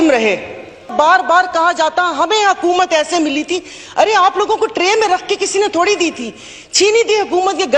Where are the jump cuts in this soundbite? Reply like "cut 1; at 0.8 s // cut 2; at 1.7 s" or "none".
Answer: cut 1; at 0.9 s